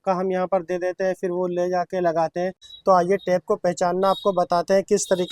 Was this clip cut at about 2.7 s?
yes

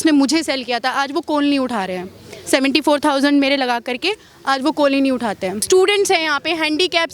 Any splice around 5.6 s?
yes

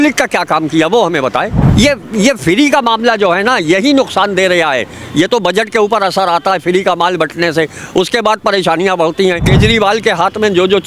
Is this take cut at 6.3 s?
no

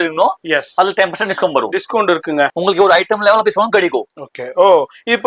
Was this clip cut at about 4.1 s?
no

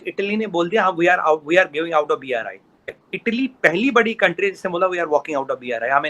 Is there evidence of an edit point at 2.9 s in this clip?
yes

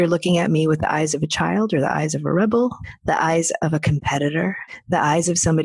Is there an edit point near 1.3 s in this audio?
no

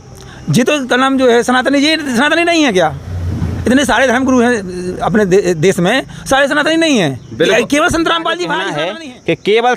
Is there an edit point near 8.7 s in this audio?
yes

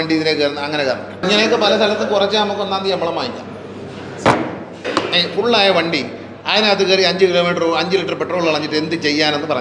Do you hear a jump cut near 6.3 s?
no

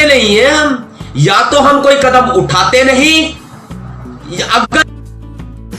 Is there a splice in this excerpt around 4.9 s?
yes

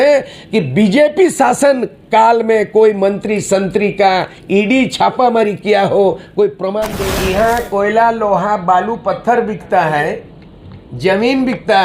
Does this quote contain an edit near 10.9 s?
no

